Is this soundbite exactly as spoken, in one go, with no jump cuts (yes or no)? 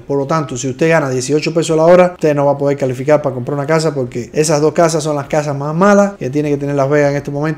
yes